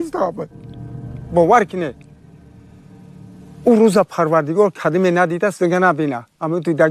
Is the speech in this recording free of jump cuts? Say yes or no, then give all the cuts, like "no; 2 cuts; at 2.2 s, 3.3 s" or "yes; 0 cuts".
yes; 0 cuts